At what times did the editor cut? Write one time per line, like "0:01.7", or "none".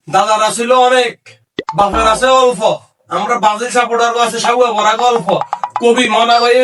none